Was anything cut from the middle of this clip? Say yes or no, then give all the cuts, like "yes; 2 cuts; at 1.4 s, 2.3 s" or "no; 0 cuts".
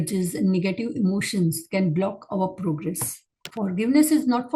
yes; 1 cut; at 3.5 s